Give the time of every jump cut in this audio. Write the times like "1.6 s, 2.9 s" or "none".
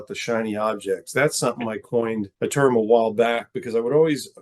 2.3 s